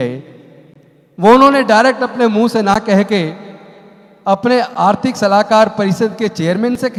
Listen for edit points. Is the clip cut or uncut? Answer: uncut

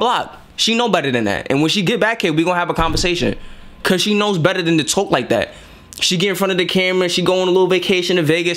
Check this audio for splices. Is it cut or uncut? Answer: uncut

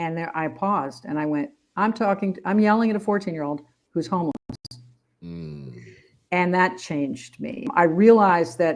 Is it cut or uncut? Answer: cut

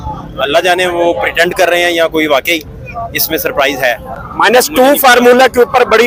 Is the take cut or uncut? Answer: uncut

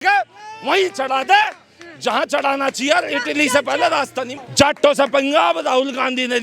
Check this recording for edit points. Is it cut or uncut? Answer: uncut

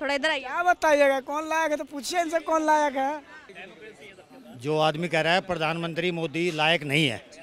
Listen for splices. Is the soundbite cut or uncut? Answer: cut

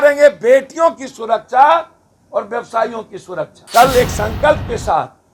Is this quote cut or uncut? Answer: cut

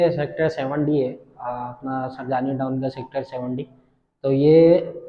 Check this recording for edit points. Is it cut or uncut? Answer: uncut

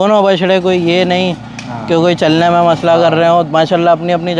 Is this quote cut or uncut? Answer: uncut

